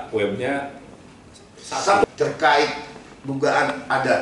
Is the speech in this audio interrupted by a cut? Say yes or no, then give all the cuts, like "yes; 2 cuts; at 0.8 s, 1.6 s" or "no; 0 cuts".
yes; 1 cut; at 2.0 s